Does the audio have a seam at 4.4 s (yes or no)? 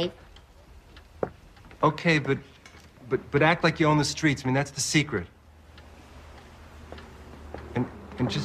yes